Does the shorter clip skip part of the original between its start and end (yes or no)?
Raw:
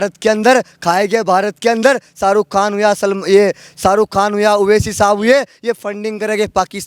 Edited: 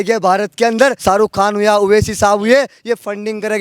yes